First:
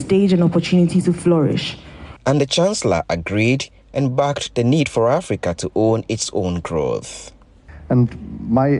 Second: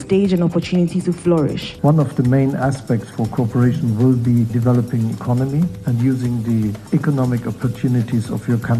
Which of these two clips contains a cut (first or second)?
second